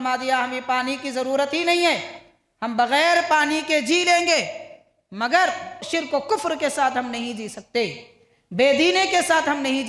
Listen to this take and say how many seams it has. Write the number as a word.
one